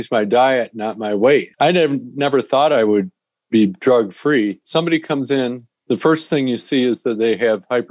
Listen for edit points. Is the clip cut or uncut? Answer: cut